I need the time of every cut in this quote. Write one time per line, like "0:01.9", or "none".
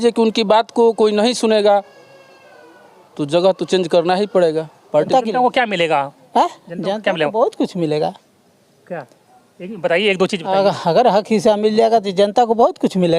0:05.1